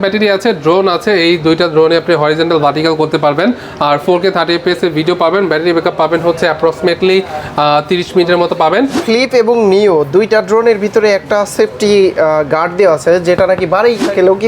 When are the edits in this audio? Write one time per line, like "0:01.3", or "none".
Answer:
0:09.0